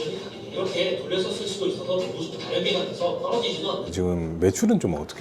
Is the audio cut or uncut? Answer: cut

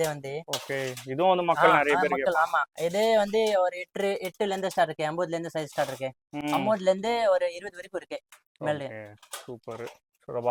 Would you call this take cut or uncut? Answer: uncut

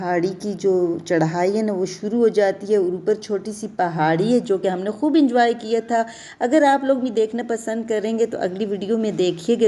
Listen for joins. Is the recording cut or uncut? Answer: uncut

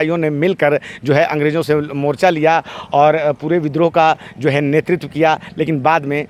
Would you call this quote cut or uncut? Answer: uncut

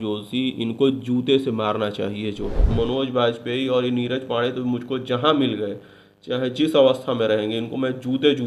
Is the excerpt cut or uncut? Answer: cut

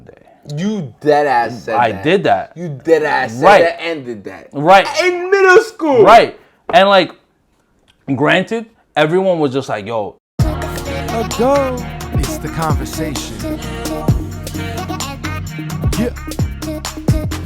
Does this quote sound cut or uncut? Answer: cut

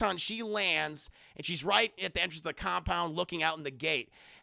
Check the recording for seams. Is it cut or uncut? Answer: uncut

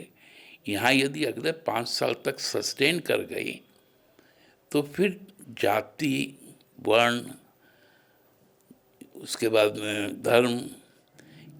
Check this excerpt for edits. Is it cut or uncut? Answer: uncut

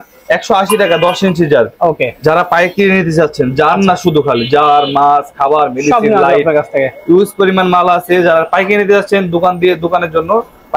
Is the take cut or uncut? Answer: uncut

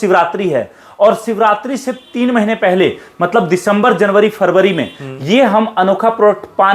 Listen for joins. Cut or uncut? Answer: uncut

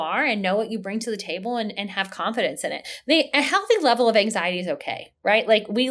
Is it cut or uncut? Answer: uncut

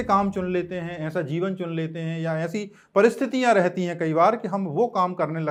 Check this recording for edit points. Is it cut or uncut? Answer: uncut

